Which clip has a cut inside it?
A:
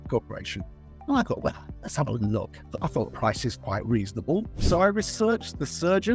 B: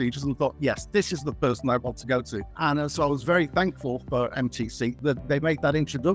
A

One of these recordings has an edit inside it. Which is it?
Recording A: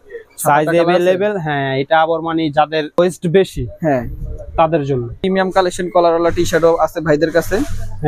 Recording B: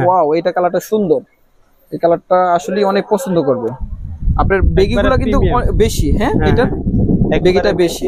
A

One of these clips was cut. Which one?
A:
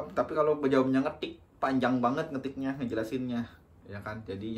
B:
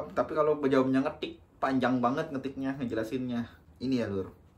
B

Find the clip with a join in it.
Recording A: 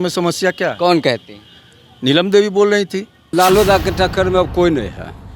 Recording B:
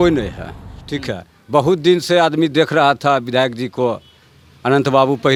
A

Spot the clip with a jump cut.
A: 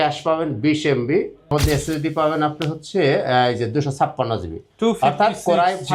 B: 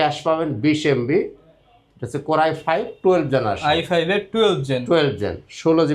A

